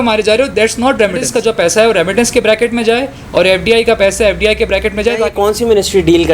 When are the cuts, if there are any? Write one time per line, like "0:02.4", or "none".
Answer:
0:01.4
0:05.3